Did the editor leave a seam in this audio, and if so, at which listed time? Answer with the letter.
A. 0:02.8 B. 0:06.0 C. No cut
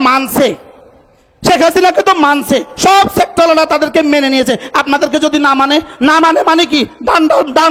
C